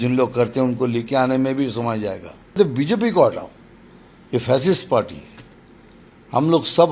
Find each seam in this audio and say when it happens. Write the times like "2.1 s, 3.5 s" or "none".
2.6 s